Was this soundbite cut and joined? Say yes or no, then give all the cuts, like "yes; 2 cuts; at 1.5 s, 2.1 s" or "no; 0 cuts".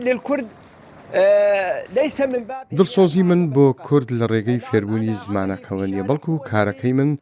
yes; 1 cut; at 2.5 s